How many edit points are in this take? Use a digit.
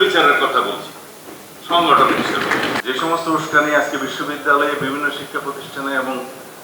1